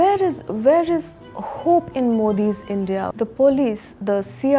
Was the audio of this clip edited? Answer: yes; 1 cut; at 3.1 s

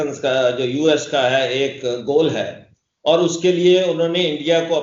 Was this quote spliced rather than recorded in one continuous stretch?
no; 0 cuts

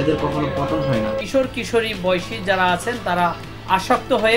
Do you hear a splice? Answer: yes; 1 cut; at 1.2 s

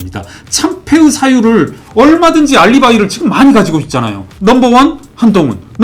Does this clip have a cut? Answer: yes; 1 cut; at 4.2 s

